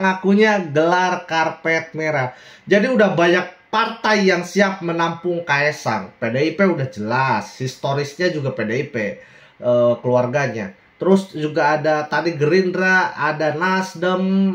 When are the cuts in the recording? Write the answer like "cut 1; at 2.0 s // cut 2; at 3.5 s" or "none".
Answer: none

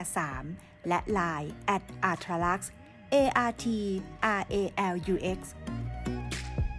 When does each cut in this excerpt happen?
cut 1; at 5.5 s

